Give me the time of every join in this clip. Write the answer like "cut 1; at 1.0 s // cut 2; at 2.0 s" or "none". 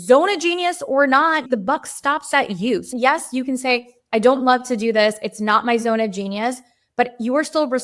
cut 1; at 2.9 s